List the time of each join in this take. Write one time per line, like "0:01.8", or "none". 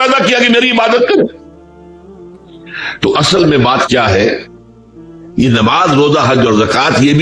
0:01.3
0:02.9